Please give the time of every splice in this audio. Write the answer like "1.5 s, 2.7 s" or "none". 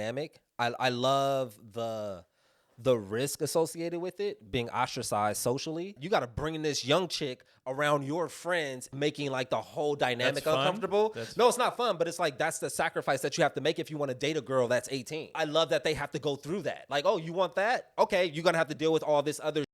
6.0 s, 8.9 s, 15.3 s, 16.8 s